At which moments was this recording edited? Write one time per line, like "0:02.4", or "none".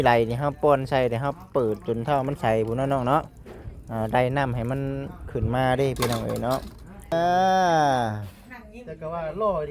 0:07.1